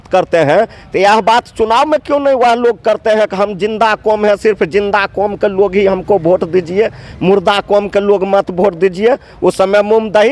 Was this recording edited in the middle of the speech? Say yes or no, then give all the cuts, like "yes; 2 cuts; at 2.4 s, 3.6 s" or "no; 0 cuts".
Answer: no; 0 cuts